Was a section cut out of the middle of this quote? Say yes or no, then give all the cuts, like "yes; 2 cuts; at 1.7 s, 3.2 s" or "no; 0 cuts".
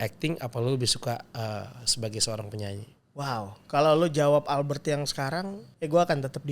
yes; 1 cut; at 5.6 s